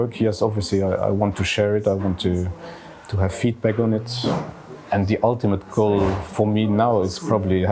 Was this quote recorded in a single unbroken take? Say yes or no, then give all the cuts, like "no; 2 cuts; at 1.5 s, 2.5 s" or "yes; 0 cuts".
yes; 0 cuts